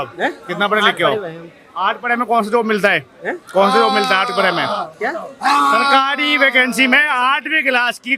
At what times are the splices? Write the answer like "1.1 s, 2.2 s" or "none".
none